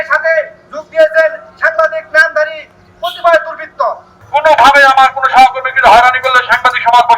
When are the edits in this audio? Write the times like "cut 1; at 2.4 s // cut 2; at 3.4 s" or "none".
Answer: cut 1; at 4.1 s